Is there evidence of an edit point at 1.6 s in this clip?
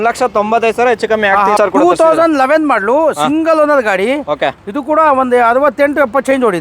yes; 1 cut; at 1.6 s

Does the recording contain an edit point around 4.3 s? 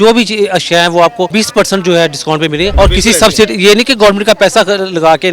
no; 2 cuts; at 1.3 s, 2.7 s

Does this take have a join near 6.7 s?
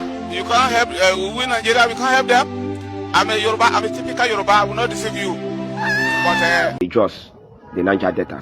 yes; 1 cut; at 6.7 s

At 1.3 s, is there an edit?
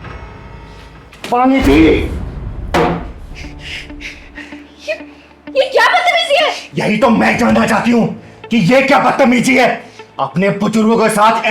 yes; 1 cut; at 1.3 s

